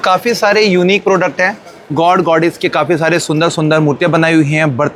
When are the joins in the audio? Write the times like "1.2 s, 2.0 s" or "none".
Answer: none